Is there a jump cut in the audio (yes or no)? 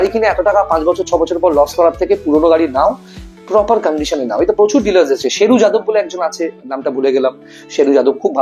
no